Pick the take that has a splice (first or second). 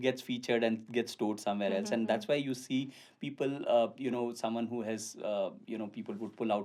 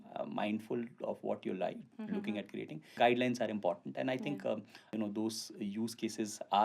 second